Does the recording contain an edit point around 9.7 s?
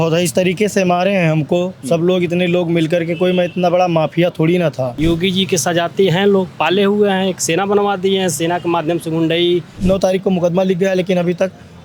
yes; 2 cuts; at 4.9 s, 9.7 s

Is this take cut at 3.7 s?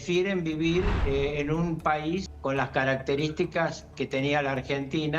no; 2 cuts; at 1.0 s, 2.3 s

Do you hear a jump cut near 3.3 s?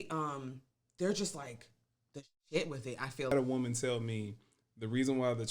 yes; 1 cut; at 3.3 s

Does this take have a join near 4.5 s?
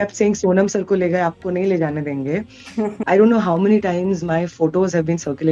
no; 1 cut; at 3.0 s

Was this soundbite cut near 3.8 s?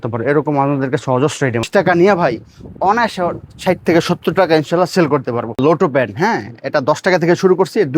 no; 2 cuts; at 1.7 s, 5.5 s

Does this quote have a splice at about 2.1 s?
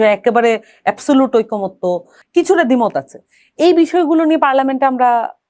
yes; 1 cut; at 2.1 s

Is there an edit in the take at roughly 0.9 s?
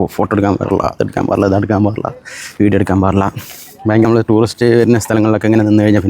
no; 1 cut; at 4.1 s

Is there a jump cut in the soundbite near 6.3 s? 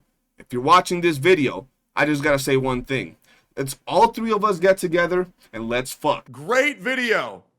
yes; 1 cut; at 6.3 s

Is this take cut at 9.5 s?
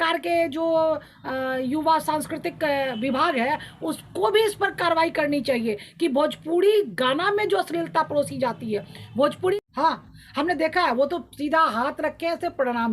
yes; 1 cut; at 9.5 s

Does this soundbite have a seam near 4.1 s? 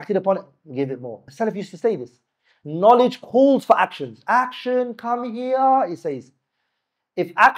no; 1 cut; at 1.2 s

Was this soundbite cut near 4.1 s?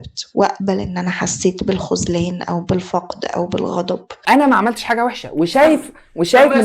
yes; 1 cut; at 4.1 s

